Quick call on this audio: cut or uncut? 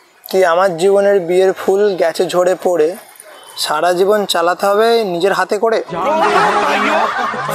uncut